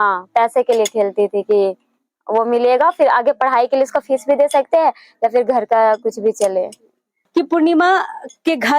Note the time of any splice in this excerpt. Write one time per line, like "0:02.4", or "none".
0:07.2